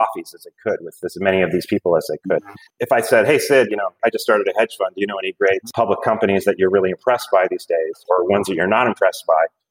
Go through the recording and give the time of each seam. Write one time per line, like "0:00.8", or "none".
0:02.7
0:08.0